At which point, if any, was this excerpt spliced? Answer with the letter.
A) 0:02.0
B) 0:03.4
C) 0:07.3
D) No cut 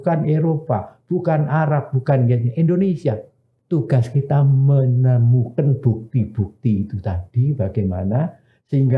B